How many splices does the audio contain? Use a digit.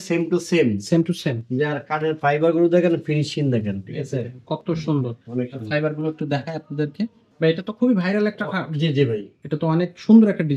1